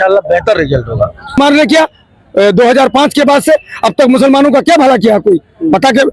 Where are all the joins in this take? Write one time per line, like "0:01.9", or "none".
0:01.4